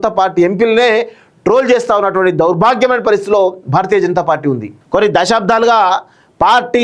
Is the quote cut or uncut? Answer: cut